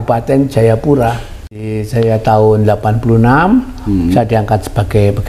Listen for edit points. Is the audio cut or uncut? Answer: cut